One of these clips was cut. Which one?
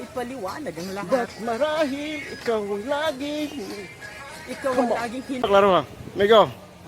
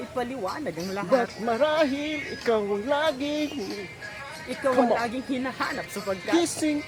first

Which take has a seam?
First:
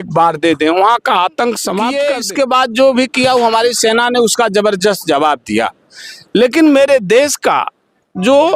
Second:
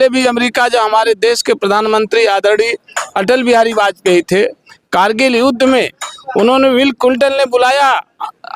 first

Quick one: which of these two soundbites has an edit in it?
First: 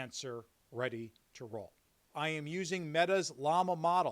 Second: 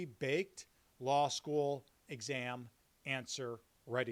first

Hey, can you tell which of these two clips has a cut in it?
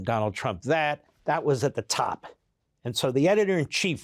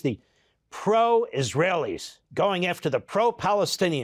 first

